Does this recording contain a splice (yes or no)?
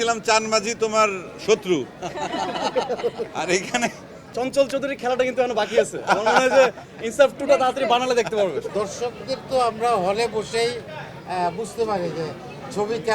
yes